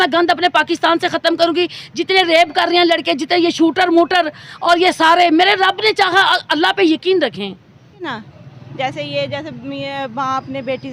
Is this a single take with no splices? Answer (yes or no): no